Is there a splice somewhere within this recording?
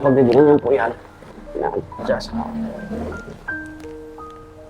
no; 0 cuts

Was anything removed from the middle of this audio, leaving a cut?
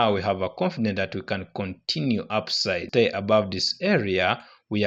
yes; 1 cut; at 2.9 s

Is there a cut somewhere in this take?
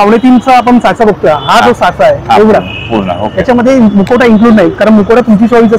no; 0 cuts

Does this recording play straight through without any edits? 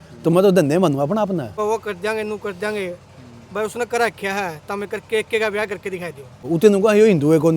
no; 2 cuts; at 1.6 s, 6.5 s

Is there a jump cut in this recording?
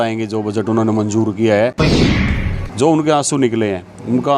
yes; 1 cut; at 2.0 s

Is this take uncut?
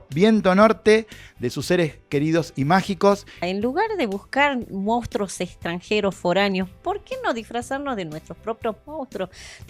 no; 1 cut; at 3.4 s

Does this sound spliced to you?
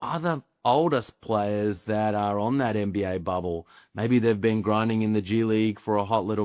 no; 0 cuts

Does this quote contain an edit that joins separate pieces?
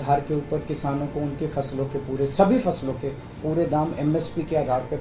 no; 0 cuts

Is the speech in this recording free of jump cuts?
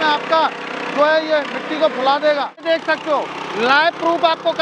no; 1 cut; at 2.7 s

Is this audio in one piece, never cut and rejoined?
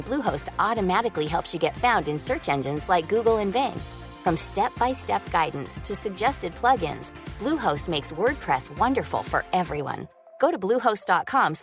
yes; 0 cuts

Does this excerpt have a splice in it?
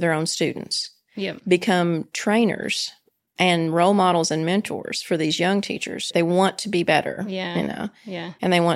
no; 0 cuts

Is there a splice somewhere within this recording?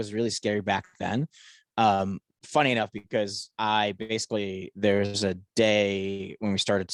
no; 0 cuts

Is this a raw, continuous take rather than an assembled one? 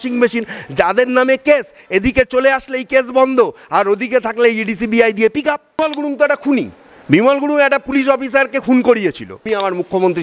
no; 2 cuts; at 5.8 s, 9.3 s

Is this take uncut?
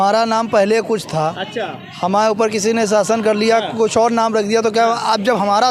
yes; 0 cuts

